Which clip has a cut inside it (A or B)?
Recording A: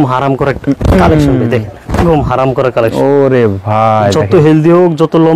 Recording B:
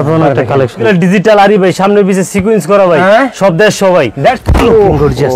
B